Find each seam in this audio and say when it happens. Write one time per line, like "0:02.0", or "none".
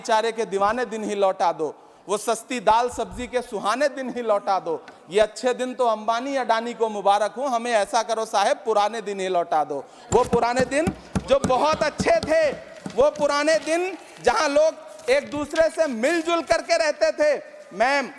none

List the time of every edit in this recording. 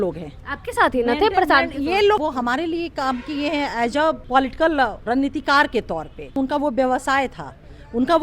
0:02.2
0:04.2
0:05.0
0:06.3

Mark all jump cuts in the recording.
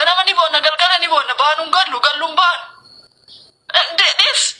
none

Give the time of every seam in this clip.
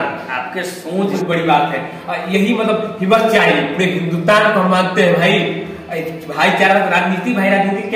0:01.1

